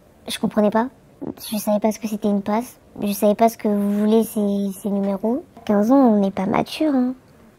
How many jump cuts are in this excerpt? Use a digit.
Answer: 1